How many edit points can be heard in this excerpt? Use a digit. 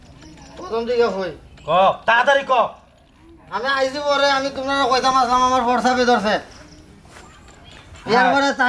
0